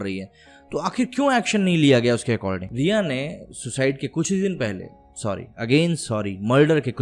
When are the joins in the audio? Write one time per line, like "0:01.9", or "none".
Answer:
0:02.7